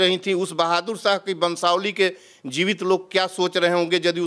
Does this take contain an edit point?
no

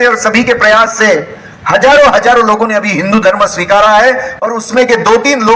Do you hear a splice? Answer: no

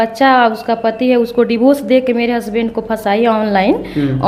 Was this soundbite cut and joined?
no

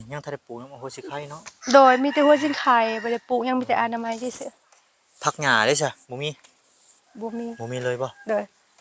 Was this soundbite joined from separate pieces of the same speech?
no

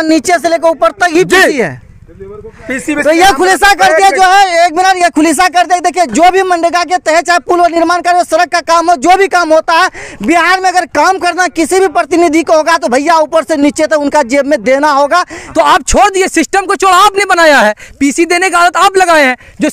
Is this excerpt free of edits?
no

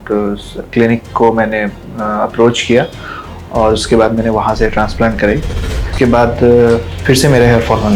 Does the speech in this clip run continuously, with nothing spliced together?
no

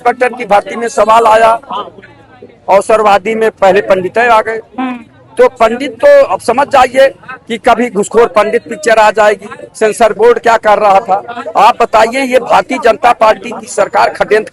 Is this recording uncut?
yes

